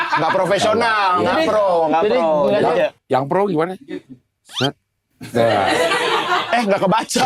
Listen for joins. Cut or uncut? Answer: uncut